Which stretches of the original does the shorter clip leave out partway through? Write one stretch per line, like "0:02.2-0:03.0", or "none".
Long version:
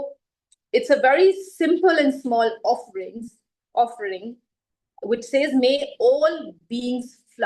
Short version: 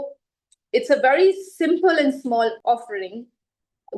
0:02.6-0:03.7